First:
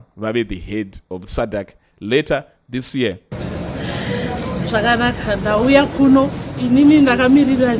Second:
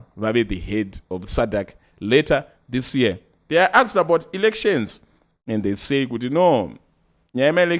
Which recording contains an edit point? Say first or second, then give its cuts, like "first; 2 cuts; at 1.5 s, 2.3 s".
first; 1 cut; at 3.3 s